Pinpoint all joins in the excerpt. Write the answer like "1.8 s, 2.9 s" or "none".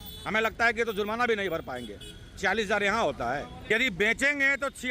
3.7 s

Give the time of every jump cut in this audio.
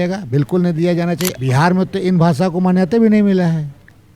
1.4 s

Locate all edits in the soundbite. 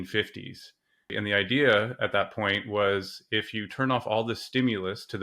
1.1 s

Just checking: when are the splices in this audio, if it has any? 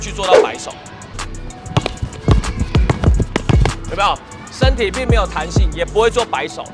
1.1 s

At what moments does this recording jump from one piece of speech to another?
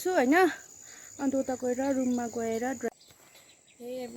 2.9 s

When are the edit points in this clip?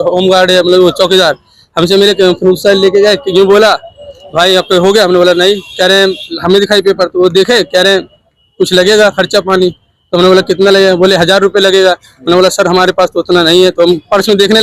none

